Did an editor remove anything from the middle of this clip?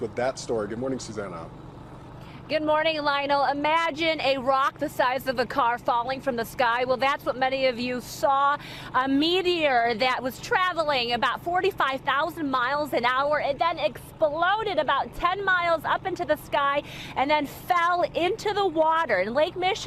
no; 0 cuts

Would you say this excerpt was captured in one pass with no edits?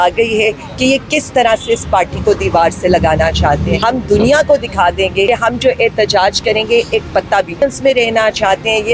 no; 3 cuts; at 3.8 s, 5.3 s, 7.6 s

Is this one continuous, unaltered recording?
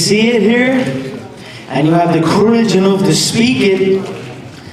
yes; 0 cuts

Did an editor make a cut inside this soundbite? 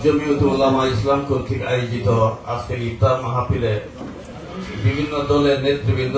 no; 0 cuts

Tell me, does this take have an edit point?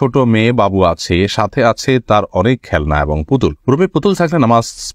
no; 0 cuts

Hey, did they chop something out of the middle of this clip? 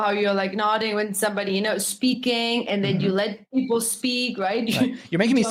no; 0 cuts

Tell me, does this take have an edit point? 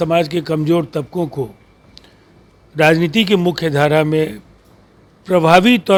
no; 0 cuts

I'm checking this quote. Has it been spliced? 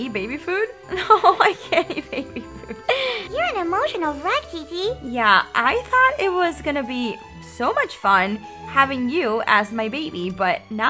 no; 0 cuts

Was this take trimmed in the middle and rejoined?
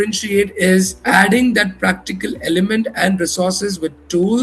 no; 0 cuts

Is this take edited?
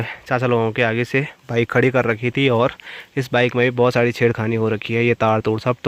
no; 0 cuts

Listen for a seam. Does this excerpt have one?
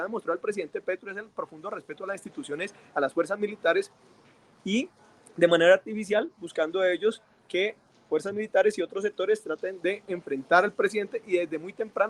no; 0 cuts

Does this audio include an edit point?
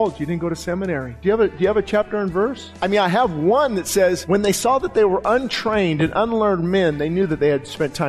yes; 3 cuts; at 1.1 s, 2.7 s, 4.2 s

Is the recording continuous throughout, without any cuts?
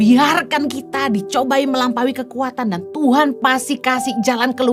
yes; 0 cuts

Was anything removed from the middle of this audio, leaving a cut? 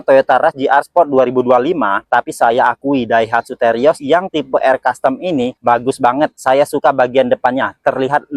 no; 0 cuts

